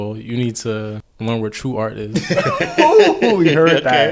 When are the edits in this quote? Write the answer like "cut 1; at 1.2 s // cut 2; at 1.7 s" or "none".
cut 1; at 1.1 s